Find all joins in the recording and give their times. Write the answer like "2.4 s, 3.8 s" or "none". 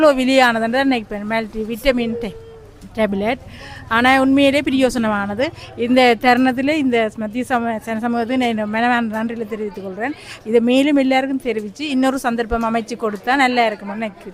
none